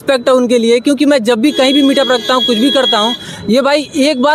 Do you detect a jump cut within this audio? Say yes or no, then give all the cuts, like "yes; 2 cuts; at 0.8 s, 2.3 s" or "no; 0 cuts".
no; 0 cuts